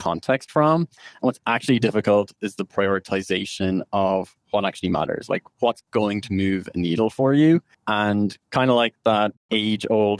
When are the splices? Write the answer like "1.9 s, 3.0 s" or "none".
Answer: 7.8 s, 9.4 s